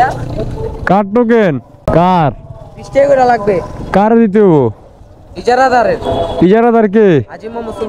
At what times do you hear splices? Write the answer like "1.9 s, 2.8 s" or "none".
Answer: 1.7 s